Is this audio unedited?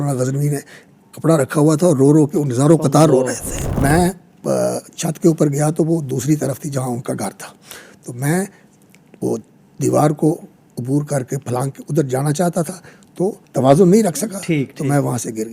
no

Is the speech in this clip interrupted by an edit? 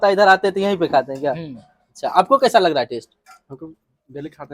no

